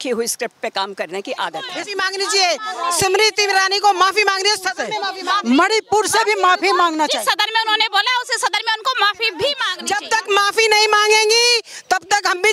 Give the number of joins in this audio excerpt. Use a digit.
2